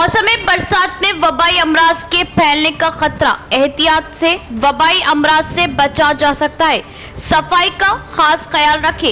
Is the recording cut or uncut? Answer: uncut